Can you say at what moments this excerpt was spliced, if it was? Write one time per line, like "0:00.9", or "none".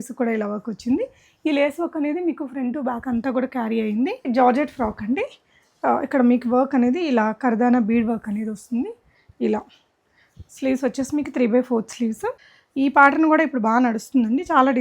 0:04.3
0:12.3